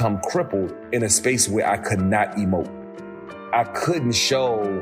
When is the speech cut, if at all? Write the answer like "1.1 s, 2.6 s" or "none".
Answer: 3.0 s